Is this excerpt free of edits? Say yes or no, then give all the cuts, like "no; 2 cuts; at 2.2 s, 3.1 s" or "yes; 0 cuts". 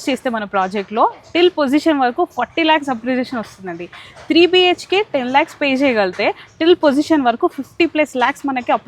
yes; 0 cuts